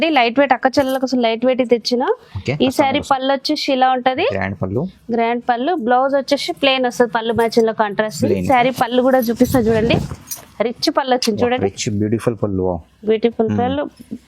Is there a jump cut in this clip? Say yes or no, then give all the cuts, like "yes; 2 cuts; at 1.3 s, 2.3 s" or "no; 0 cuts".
yes; 1 cut; at 8.4 s